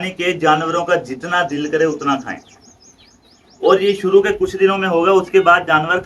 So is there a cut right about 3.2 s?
no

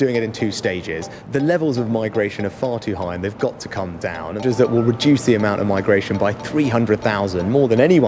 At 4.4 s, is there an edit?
yes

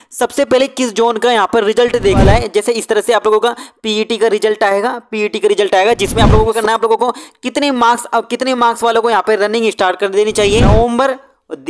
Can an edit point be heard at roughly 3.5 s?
no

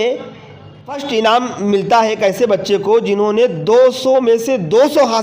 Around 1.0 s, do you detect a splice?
yes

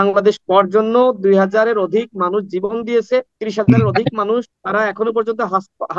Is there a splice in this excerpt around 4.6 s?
yes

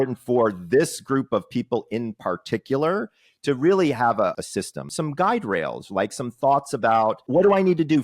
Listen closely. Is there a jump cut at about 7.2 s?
yes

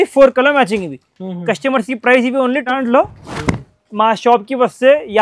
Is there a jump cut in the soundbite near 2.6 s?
yes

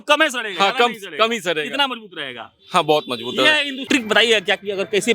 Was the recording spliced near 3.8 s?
yes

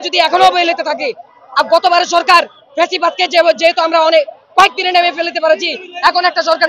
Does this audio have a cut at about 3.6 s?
no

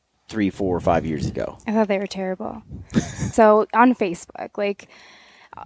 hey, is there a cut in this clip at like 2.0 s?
no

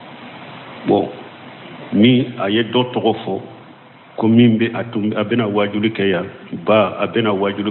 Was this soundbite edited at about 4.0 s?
no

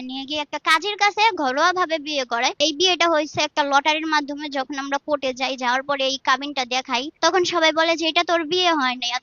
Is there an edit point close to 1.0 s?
no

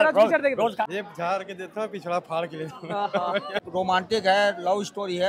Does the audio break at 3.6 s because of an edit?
yes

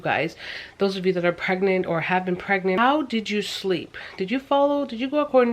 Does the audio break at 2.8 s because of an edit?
yes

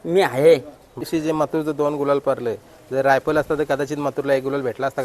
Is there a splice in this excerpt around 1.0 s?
yes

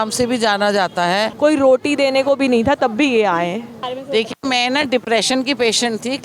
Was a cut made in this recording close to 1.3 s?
yes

